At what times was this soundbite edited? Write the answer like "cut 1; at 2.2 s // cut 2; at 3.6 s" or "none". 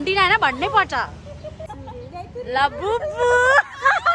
cut 1; at 1.7 s